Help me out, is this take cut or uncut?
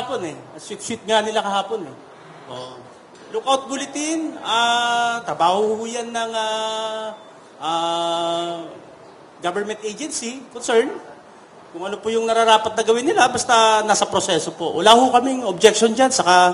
uncut